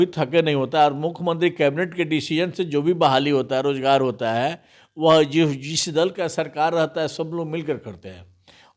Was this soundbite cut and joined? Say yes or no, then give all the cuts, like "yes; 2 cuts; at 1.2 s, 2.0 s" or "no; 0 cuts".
no; 0 cuts